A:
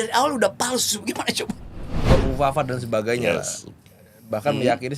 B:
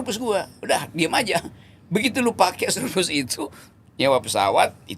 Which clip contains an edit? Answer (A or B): A